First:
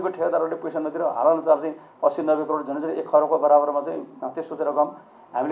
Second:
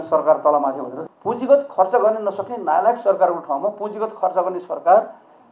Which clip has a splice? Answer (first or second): second